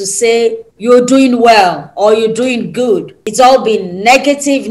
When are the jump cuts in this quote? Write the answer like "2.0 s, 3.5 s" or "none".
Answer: 3.2 s